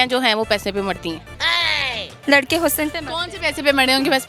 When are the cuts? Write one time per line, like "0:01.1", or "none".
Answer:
0:02.1